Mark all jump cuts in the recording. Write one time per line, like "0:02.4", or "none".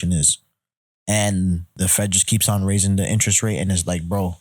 0:01.7